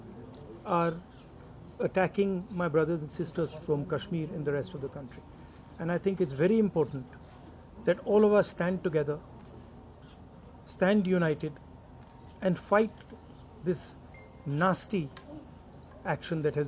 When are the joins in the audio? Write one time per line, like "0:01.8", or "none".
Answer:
none